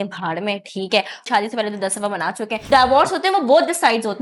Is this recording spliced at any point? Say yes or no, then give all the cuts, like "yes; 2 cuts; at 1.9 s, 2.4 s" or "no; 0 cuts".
yes; 2 cuts; at 1.2 s, 2.6 s